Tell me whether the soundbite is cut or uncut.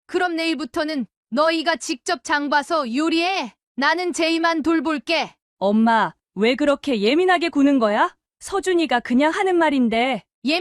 cut